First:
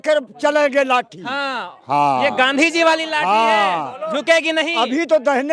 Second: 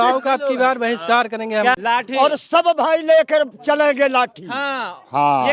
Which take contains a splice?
second; 1 cut; at 1.8 s

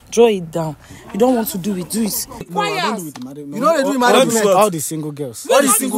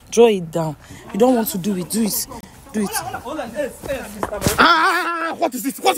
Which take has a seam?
first; 1 cut; at 2.5 s

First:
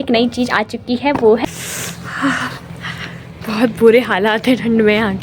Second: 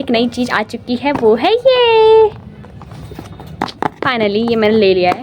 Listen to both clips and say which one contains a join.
first; 1 cut; at 1.4 s

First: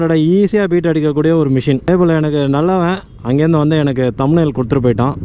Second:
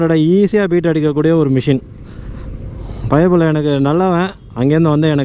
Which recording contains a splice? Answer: first; 1 cut; at 1.9 s

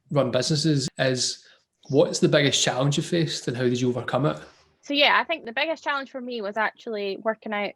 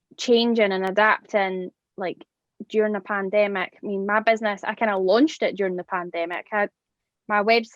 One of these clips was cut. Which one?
first; 3 cuts; at 0.9 s, 4.5 s, 5.4 s

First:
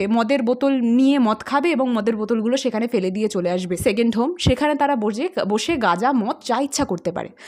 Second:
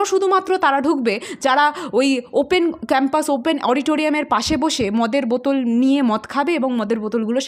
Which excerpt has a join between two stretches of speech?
first; 1 cut; at 3.8 s

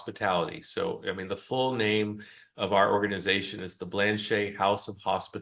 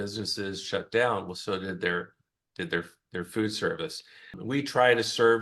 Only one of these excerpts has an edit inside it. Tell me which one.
second; 1 cut; at 4.4 s

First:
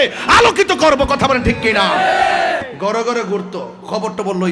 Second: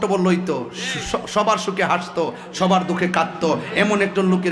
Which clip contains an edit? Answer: first; 1 cut; at 2.7 s

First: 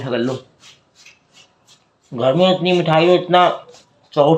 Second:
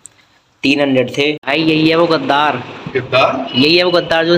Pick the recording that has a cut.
second; 1 cut; at 1.4 s

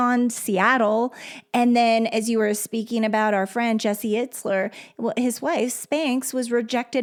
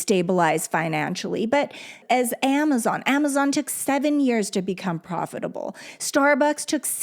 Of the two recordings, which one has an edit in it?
second; 1 cut; at 2.0 s

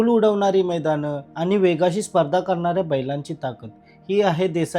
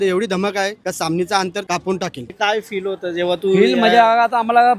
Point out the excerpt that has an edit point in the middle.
second; 1 cut; at 2.3 s

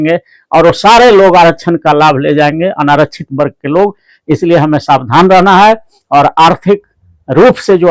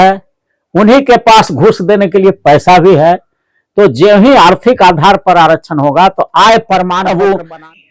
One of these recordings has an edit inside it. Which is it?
second; 1 cut; at 7.0 s

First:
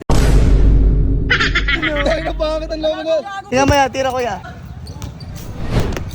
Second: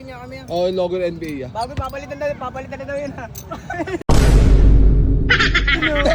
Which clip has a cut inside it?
first; 2 cuts; at 3.4 s, 4.4 s

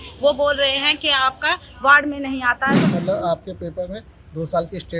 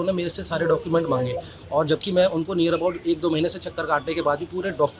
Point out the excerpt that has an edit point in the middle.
first; 1 cut; at 2.9 s

